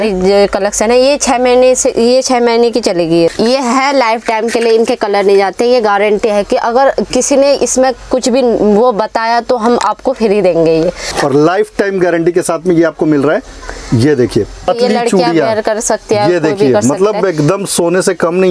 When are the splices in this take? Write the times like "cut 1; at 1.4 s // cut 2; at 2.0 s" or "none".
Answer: cut 1; at 3.3 s // cut 2; at 11.1 s // cut 3; at 14.7 s